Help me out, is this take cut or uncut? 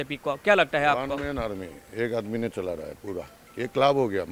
uncut